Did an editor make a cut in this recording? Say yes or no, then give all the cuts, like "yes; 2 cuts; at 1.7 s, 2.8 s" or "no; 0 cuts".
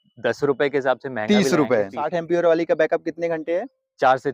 yes; 1 cut; at 2.1 s